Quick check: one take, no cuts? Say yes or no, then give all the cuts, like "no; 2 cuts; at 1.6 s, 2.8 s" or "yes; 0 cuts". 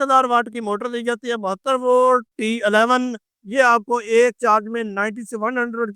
no; 1 cut; at 2.3 s